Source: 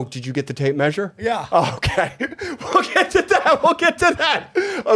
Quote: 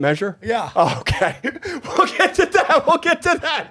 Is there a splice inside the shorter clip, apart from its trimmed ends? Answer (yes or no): no